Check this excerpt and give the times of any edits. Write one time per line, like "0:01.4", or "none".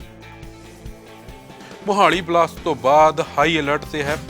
0:01.6